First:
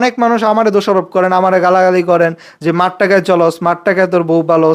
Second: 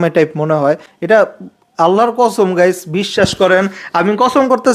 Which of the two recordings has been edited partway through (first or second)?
second